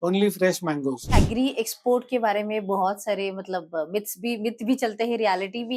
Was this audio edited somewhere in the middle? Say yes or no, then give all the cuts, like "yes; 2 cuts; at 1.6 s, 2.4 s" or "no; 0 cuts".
yes; 1 cut; at 1.1 s